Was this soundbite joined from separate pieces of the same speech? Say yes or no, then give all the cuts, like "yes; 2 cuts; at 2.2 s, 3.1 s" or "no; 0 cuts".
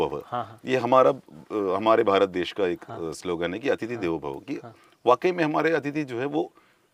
no; 0 cuts